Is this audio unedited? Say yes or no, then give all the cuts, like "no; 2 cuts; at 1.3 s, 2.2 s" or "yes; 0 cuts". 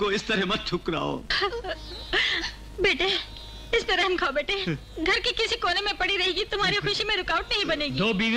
yes; 0 cuts